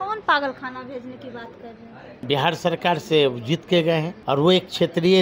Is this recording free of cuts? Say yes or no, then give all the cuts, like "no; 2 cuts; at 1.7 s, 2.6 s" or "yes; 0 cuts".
no; 2 cuts; at 2.2 s, 4.2 s